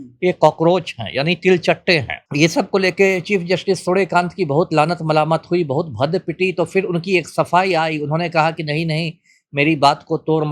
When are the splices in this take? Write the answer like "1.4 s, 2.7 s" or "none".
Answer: 2.2 s